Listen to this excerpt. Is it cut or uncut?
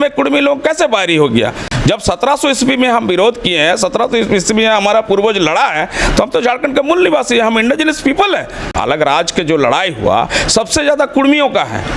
cut